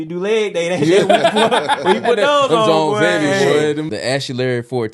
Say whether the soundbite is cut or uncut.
cut